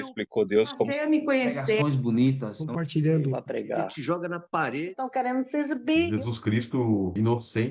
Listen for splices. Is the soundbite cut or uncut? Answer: uncut